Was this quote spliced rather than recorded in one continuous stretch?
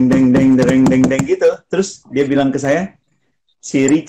no; 0 cuts

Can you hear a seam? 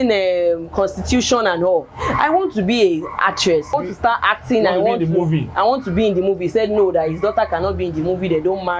yes; 1 cut; at 3.7 s

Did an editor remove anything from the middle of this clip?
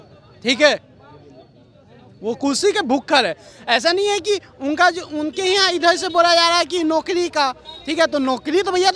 no; 0 cuts

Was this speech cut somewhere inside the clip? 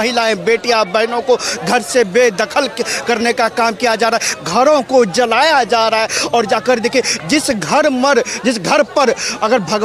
no; 0 cuts

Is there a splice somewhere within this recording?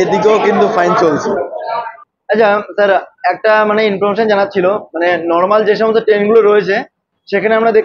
yes; 1 cut; at 1.9 s

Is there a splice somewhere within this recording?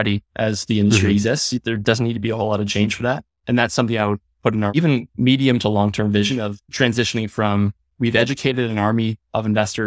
yes; 3 cuts; at 4.8 s, 6.6 s, 7.8 s

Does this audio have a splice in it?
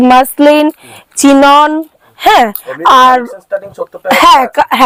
no; 0 cuts

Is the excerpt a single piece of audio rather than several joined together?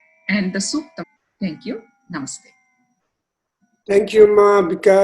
no; 1 cut; at 1.0 s

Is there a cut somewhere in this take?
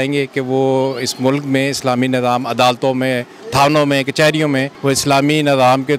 yes; 1 cut; at 4.7 s

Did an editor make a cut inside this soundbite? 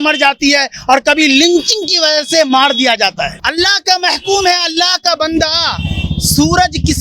yes; 1 cut; at 3.4 s

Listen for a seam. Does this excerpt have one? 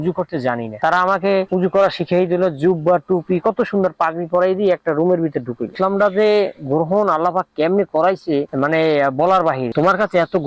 yes; 2 cuts; at 5.7 s, 9.7 s

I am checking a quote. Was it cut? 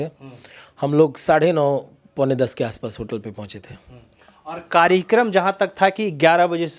no; 0 cuts

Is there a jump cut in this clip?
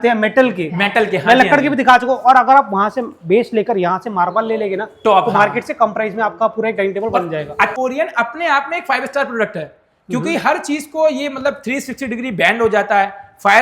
yes; 1 cut; at 7.7 s

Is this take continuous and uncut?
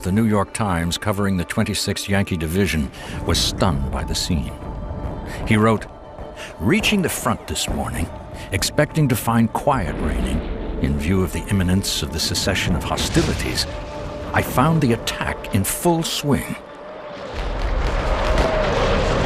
no; 1 cut; at 4.8 s

